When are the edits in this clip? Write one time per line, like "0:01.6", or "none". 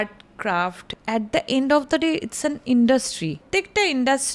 0:00.9
0:03.4